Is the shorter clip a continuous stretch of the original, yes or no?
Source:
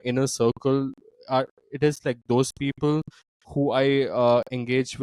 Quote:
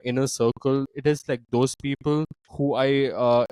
no